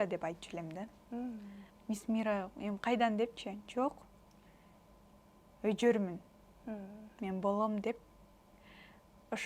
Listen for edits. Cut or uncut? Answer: uncut